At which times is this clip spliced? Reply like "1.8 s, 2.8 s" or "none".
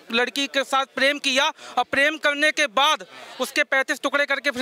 none

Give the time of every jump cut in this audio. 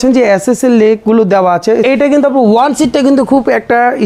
1.8 s

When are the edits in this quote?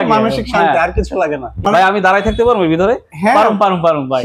1.6 s

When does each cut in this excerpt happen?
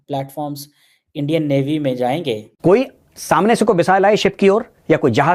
2.5 s

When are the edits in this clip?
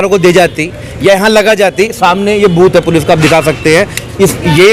none

